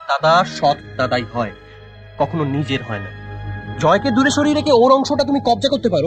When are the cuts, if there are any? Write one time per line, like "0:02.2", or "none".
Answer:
none

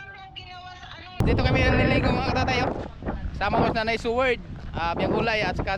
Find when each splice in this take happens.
0:01.2

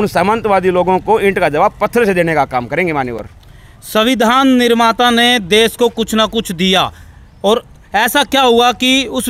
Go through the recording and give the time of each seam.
none

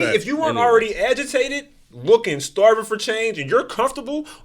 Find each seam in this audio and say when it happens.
0:01.9

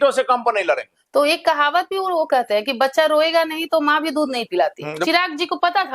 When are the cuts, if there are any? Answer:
0:00.9
0:05.0

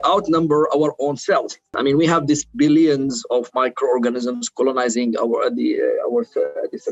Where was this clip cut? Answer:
0:01.7

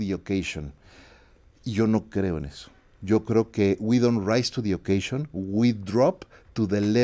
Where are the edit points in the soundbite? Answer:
none

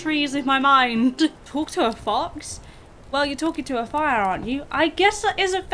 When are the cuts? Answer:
0:01.4

